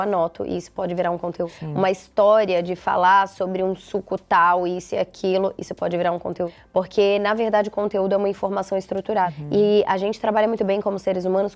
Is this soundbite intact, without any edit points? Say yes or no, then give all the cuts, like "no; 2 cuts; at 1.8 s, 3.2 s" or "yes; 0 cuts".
no; 3 cuts; at 1.6 s, 6.6 s, 9.4 s